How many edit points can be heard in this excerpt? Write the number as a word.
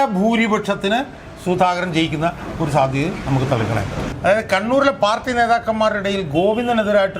one